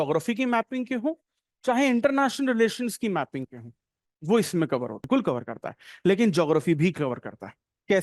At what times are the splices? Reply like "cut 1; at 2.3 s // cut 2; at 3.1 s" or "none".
cut 1; at 5.1 s

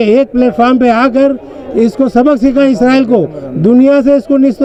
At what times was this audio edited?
none

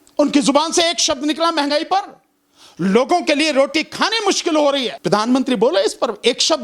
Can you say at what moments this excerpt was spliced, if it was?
cut 1; at 4.9 s

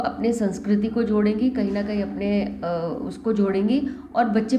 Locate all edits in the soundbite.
none

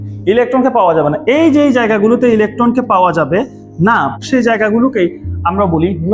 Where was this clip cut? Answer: cut 1; at 4.2 s

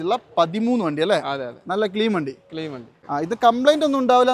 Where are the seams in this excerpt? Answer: cut 1; at 2.9 s

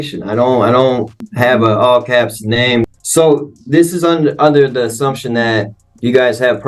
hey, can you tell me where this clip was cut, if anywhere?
cut 1; at 1.3 s // cut 2; at 2.8 s

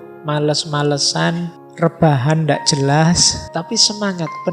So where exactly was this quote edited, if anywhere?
cut 1; at 1.6 s // cut 2; at 3.4 s

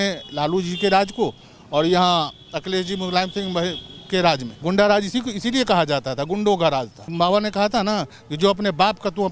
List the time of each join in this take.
cut 1; at 4.5 s // cut 2; at 7.1 s

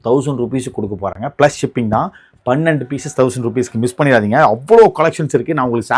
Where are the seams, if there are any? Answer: none

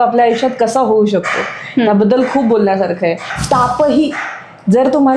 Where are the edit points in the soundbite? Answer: cut 1; at 3.3 s

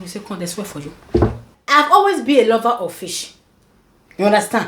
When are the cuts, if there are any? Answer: none

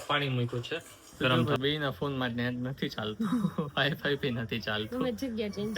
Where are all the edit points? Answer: cut 1; at 1.4 s

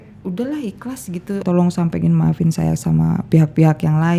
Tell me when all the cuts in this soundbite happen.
cut 1; at 1.4 s

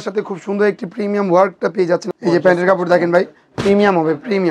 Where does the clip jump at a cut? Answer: cut 1; at 2.4 s

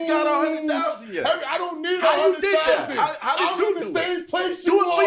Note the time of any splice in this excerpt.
none

